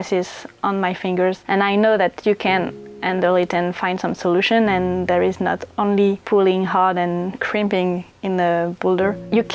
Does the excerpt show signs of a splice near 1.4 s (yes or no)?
yes